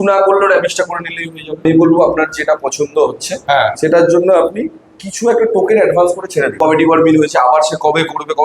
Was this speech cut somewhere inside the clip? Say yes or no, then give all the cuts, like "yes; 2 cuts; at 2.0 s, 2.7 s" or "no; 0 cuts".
yes; 2 cuts; at 1.6 s, 6.5 s